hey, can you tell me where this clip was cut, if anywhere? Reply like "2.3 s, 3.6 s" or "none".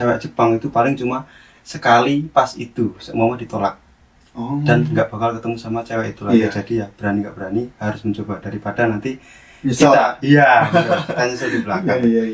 none